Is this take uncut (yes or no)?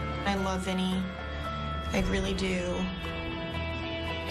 yes